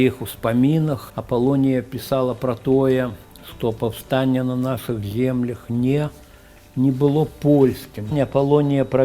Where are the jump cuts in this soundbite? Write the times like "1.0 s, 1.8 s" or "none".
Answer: 1.1 s, 8.1 s